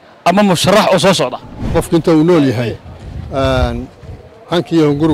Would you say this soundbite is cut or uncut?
cut